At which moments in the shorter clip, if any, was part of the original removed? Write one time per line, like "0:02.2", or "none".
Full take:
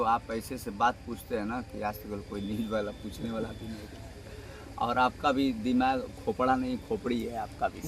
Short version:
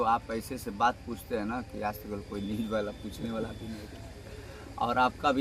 none